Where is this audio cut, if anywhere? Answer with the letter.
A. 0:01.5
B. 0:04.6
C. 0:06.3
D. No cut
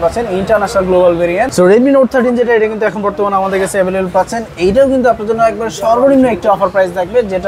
A